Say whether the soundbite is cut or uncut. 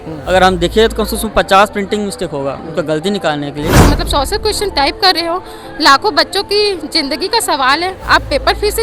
cut